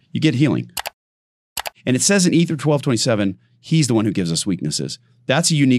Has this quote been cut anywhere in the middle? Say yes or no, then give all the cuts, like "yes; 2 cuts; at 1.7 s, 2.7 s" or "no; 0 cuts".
yes; 1 cut; at 1.3 s